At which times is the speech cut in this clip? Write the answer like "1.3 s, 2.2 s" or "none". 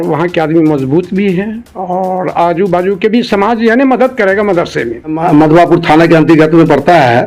5.2 s